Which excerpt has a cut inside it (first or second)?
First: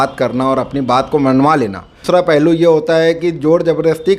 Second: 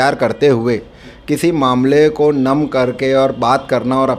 first